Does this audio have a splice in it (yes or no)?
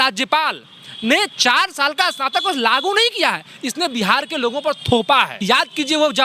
yes